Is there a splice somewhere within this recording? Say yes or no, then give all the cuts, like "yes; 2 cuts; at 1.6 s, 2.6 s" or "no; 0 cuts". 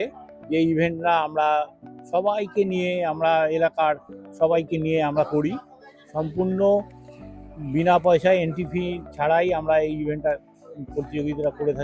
no; 0 cuts